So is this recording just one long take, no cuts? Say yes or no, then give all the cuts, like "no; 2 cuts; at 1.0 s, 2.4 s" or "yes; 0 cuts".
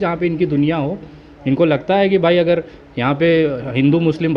yes; 0 cuts